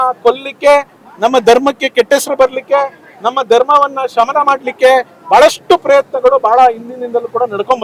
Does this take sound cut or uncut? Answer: uncut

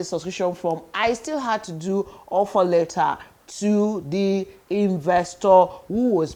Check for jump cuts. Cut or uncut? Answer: uncut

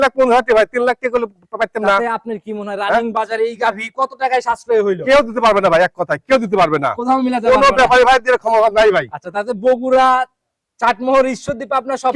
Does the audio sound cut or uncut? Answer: uncut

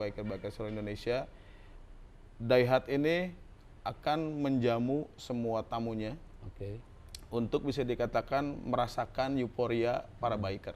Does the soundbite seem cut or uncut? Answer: uncut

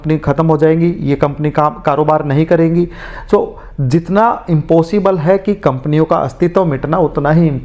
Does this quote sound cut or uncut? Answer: uncut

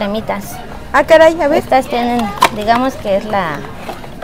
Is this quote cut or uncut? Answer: uncut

